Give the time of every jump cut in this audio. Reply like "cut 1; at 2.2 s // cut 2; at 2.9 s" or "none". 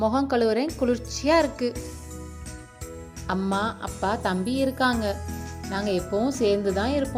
none